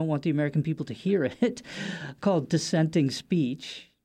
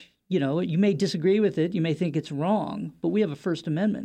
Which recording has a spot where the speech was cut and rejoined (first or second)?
first